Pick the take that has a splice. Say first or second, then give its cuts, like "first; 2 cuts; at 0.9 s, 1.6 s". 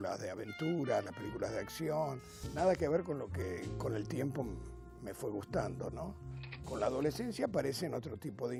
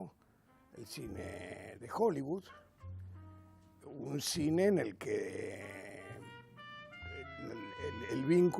second; 1 cut; at 6.5 s